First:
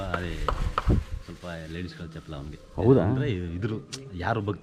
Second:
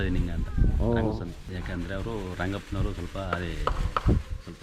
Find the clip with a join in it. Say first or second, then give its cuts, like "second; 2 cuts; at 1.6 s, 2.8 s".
second; 1 cut; at 1.4 s